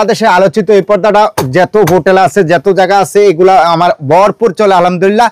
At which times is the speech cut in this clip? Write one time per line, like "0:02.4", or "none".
none